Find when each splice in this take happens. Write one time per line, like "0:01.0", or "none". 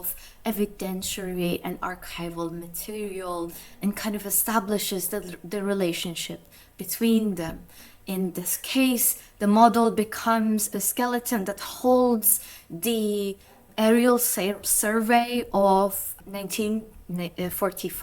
0:10.8
0:13.6
0:16.1